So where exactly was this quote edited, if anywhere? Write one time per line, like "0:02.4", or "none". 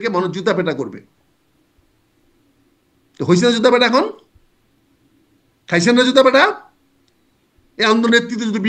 none